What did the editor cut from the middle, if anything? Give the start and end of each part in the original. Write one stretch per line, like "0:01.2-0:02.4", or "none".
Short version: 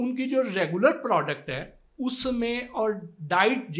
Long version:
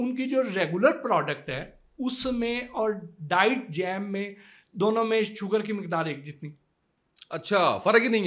none